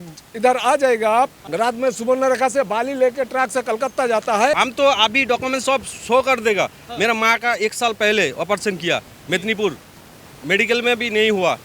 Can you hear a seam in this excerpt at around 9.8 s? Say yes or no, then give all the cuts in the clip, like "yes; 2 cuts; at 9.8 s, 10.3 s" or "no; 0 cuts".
no; 2 cuts; at 1.4 s, 4.6 s